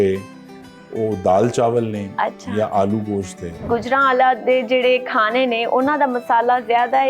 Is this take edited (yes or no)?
yes